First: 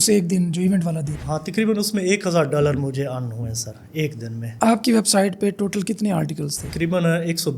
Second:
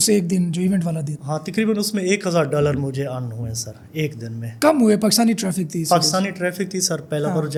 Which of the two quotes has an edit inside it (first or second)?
first